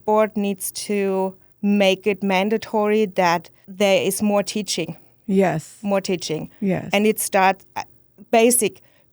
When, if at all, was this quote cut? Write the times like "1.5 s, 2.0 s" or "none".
1.4 s, 3.6 s

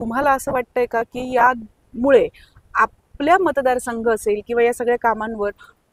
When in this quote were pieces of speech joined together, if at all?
none

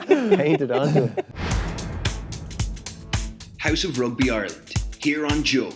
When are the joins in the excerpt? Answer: 1.3 s

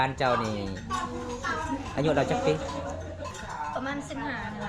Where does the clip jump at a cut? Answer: 3.3 s

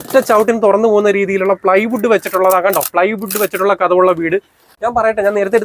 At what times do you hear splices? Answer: 4.6 s

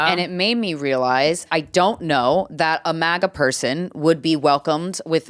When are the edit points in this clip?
1.5 s

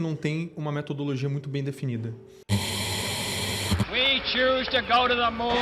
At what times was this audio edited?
2.4 s

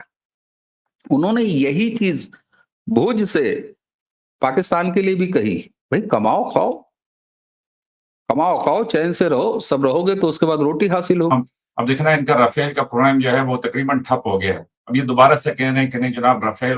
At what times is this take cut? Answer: 11.3 s

